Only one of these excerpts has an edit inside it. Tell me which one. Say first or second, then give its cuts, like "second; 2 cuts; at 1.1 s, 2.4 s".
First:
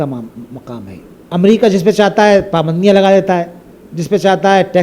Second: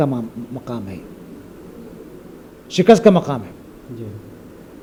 first; 1 cut; at 1.1 s